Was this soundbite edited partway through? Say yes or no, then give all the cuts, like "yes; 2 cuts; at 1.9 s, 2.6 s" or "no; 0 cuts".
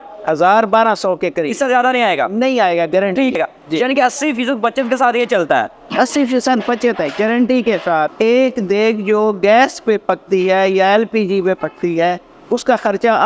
yes; 2 cuts; at 3.3 s, 8.1 s